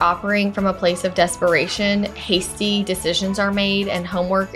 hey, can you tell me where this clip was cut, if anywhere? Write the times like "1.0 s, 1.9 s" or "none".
none